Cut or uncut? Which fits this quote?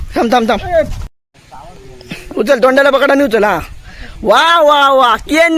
cut